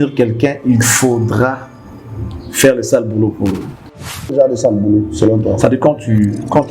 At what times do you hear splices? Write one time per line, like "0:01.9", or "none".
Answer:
0:04.3

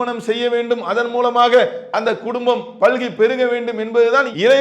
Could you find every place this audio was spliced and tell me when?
none

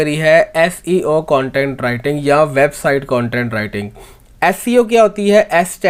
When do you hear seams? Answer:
none

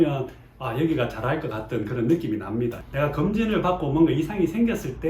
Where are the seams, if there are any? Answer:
0:02.8

